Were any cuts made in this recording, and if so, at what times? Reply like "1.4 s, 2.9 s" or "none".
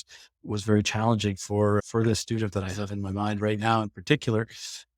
none